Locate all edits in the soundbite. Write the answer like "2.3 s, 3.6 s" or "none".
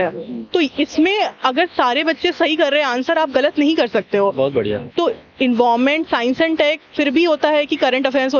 none